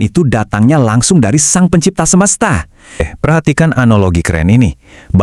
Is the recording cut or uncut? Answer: cut